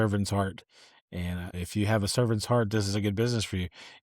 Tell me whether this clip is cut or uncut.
cut